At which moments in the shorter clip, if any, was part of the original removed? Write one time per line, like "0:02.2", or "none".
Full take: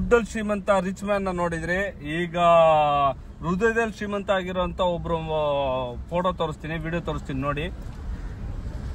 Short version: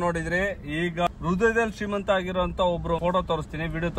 0:01.0
0:03.0